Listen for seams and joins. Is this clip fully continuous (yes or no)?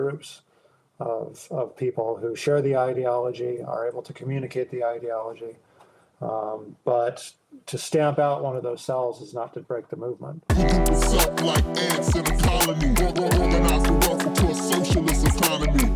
no